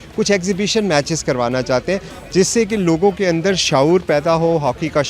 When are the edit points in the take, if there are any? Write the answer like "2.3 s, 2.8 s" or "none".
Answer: none